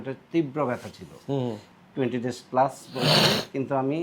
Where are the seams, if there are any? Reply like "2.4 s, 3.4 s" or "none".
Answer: 1.7 s